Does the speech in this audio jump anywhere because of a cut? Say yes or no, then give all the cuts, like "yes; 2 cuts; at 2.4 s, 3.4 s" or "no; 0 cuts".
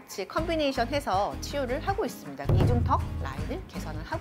yes; 1 cut; at 2.4 s